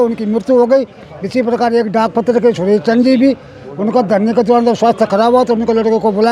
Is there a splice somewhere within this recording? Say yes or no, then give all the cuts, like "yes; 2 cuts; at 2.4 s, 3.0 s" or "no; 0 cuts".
no; 0 cuts